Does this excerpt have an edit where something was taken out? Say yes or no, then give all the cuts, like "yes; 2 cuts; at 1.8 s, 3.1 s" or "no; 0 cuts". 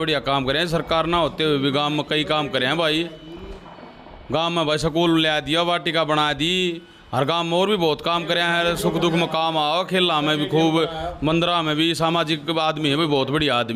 no; 0 cuts